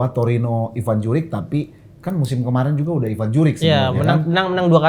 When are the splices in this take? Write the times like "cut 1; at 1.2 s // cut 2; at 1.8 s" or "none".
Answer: none